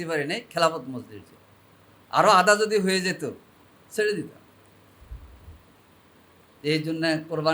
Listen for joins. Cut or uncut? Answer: uncut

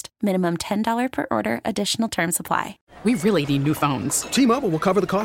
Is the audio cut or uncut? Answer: cut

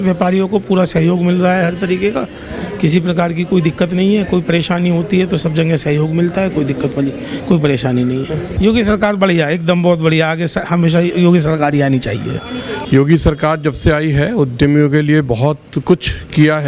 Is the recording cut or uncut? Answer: cut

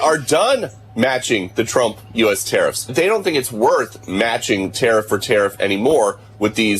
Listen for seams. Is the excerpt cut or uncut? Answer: cut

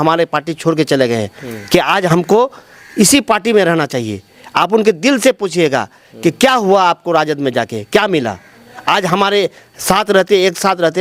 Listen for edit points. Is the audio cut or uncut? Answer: uncut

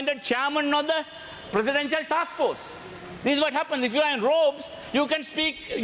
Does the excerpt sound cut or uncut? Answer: uncut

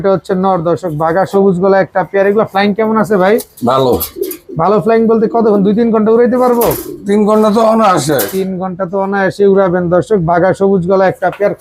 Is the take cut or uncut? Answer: uncut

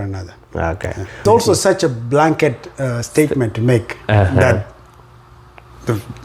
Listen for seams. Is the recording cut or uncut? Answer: cut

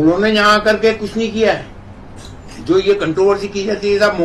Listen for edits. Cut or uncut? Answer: uncut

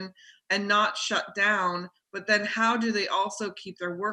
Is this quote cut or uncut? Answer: uncut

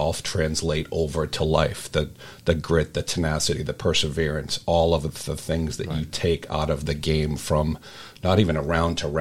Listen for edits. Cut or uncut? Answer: uncut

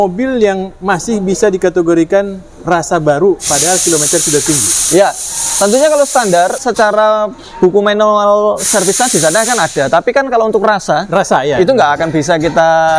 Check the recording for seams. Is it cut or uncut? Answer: uncut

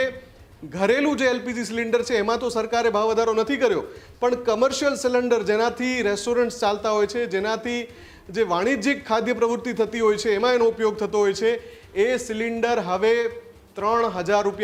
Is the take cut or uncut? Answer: uncut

